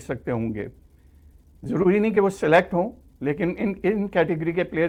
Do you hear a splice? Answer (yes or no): no